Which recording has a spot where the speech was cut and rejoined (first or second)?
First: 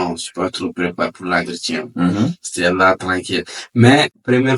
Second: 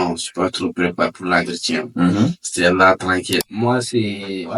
second